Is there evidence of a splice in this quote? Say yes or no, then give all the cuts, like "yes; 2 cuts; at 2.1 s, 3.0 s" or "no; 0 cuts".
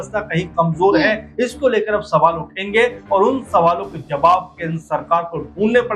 no; 0 cuts